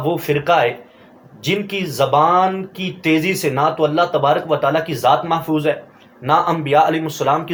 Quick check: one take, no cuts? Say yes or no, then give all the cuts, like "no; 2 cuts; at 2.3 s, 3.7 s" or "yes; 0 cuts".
yes; 0 cuts